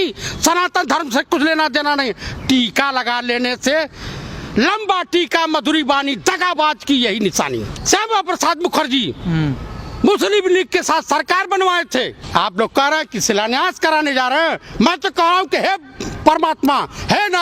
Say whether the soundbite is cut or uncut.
cut